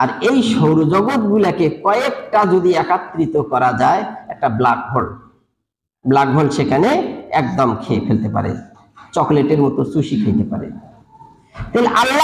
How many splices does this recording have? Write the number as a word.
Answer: zero